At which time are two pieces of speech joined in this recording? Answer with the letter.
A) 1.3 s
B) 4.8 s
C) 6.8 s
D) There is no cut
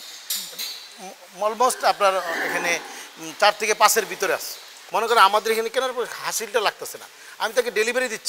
B